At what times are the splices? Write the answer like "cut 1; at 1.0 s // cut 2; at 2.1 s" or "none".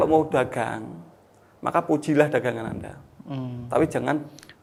none